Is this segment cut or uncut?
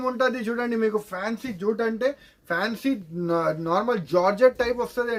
uncut